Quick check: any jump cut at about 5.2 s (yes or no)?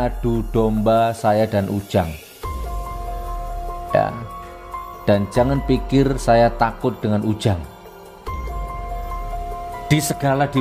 no